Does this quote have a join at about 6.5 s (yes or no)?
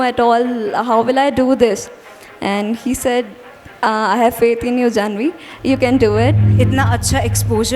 yes